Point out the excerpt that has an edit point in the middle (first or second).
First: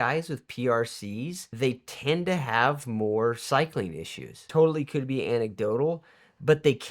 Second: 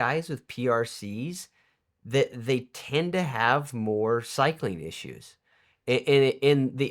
first